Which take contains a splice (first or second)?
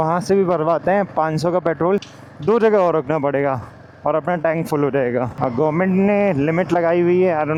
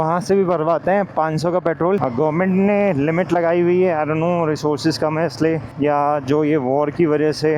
second